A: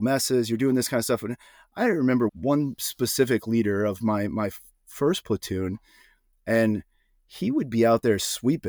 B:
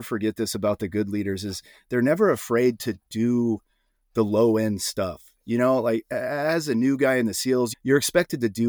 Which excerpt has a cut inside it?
A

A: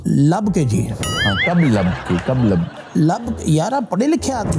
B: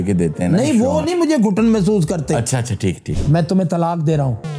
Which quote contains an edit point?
B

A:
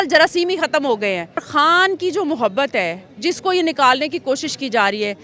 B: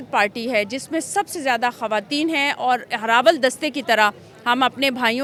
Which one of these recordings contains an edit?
A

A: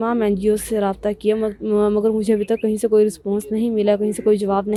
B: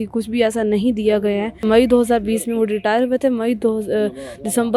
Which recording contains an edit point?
B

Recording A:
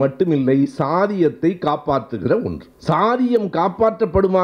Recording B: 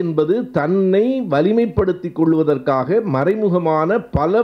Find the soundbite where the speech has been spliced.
A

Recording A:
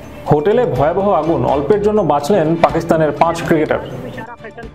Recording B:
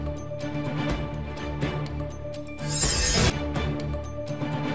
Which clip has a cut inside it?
B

